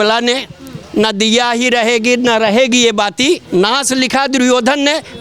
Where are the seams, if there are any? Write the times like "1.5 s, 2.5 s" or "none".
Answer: 3.4 s

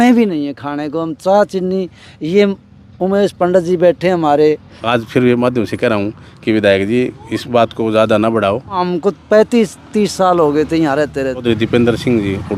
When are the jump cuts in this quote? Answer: 4.7 s, 8.8 s, 11.4 s

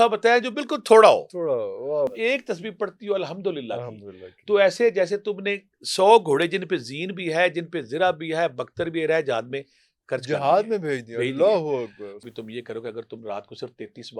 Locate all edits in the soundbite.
2.1 s, 12.1 s

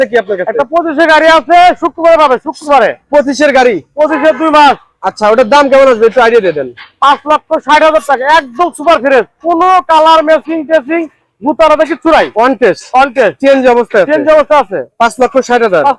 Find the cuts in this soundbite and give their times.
none

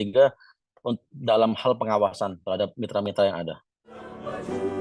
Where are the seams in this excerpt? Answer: 3.8 s

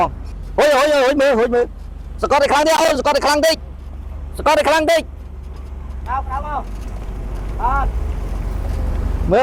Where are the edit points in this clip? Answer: none

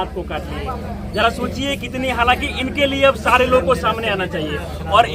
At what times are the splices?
none

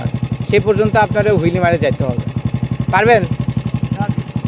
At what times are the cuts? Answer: none

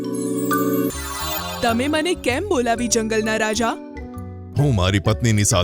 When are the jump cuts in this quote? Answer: 0.9 s

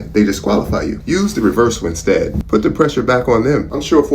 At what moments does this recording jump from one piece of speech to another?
1.0 s

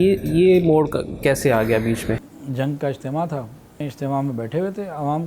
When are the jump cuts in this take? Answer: 2.4 s, 3.9 s

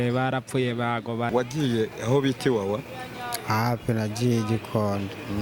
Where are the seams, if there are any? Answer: 1.3 s

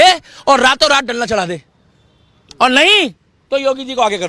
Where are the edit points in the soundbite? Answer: none

